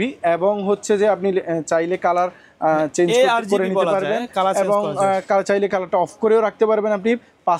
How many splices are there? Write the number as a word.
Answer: zero